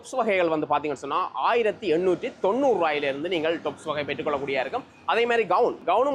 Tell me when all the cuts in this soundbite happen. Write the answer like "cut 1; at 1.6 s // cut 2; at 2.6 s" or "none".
none